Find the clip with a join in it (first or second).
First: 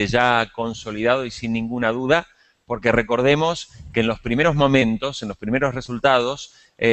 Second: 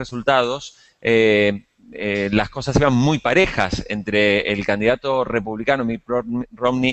second